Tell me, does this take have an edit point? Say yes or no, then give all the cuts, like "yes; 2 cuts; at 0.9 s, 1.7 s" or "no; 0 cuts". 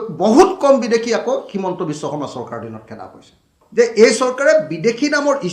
yes; 1 cut; at 3.5 s